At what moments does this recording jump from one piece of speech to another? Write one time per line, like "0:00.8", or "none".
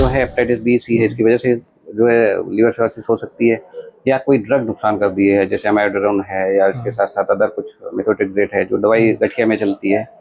none